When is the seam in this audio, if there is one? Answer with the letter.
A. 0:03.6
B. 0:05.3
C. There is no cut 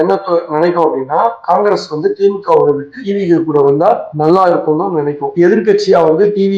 B